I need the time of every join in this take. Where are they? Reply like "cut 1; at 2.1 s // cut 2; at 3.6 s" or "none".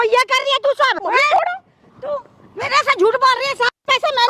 cut 1; at 1.0 s